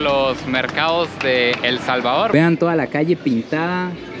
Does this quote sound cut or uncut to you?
cut